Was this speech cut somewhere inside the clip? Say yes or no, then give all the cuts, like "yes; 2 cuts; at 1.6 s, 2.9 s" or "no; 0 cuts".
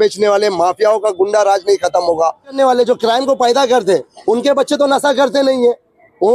yes; 1 cut; at 2.6 s